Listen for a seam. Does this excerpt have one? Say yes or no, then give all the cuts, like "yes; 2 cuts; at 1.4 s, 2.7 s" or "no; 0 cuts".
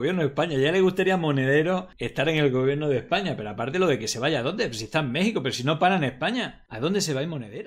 yes; 2 cuts; at 2.0 s, 6.6 s